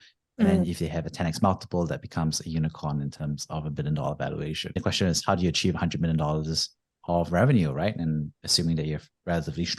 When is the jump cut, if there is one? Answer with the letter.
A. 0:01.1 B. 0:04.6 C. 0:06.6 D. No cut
B